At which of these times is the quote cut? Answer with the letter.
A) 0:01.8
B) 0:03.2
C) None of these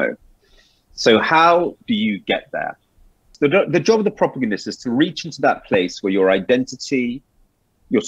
B